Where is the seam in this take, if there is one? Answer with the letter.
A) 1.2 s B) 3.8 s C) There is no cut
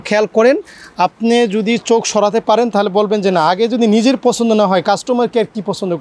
C